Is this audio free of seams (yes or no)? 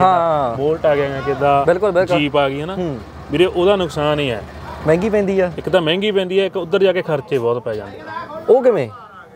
yes